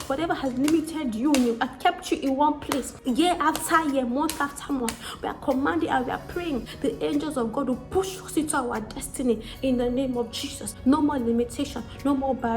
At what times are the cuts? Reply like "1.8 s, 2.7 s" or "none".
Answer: 2.9 s, 6.7 s, 10.7 s